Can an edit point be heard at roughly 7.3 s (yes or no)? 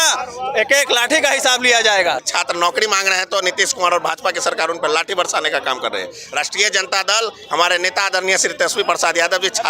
no